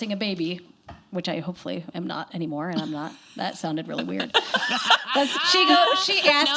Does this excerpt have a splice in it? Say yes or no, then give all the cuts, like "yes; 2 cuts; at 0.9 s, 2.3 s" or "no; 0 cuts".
no; 0 cuts